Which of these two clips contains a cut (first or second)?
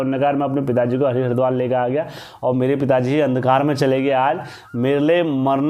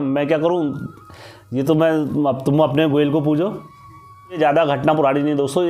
second